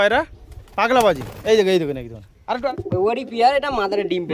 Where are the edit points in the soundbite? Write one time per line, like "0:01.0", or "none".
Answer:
0:02.7

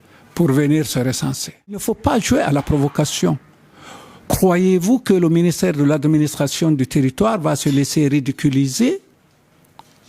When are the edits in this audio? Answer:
0:01.8

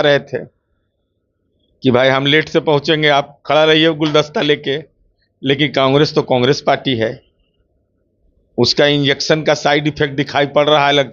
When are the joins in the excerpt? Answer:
none

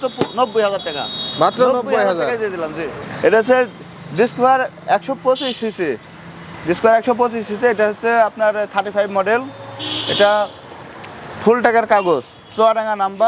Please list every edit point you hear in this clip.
none

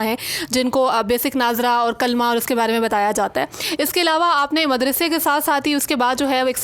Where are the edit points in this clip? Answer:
none

